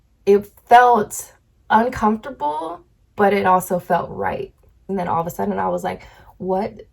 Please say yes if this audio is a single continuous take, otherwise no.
no